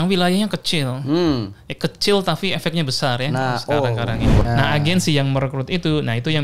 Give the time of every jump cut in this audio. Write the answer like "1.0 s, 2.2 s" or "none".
4.3 s